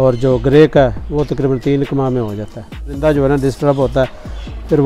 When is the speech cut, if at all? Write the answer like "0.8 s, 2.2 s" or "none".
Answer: 2.9 s

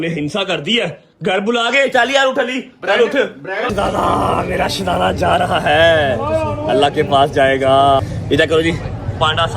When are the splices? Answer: 3.7 s, 8.0 s

